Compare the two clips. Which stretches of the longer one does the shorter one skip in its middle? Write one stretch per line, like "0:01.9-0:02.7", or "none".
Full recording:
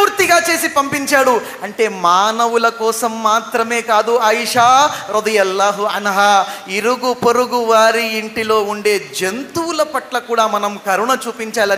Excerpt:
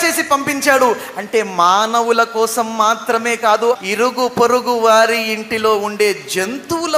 0:04.2-0:06.6